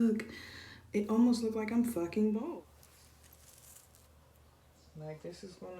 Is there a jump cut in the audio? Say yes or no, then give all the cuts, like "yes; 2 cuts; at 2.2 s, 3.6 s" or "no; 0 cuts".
yes; 1 cut; at 2.5 s